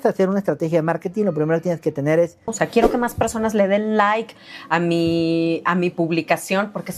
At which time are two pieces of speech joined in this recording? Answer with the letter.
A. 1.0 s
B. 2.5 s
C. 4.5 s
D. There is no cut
B